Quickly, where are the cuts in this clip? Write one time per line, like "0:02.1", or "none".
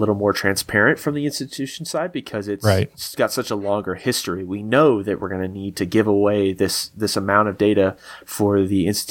none